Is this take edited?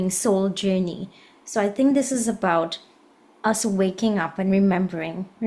no; 0 cuts

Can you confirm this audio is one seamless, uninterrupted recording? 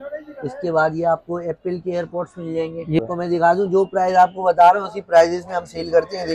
no; 1 cut; at 3.0 s

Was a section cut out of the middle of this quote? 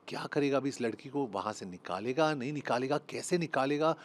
no; 0 cuts

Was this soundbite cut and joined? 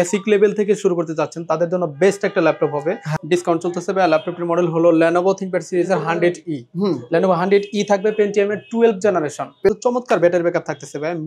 yes; 2 cuts; at 3.1 s, 9.7 s

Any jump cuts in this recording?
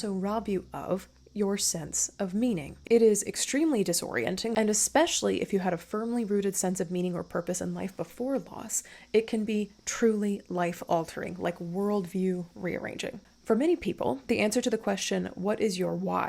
yes; 3 cuts; at 2.8 s, 4.5 s, 13.3 s

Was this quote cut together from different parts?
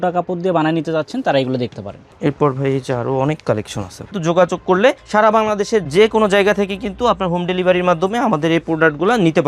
yes; 1 cut; at 4.2 s

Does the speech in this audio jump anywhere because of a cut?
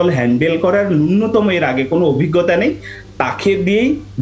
no; 0 cuts

